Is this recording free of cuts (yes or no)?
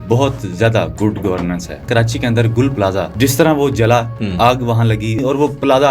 no